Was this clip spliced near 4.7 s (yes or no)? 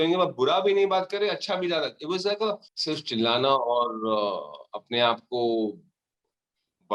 no